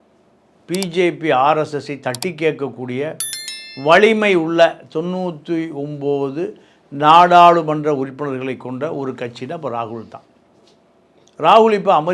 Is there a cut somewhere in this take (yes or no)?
no